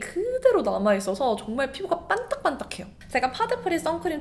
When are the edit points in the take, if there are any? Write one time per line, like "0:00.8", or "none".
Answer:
0:02.9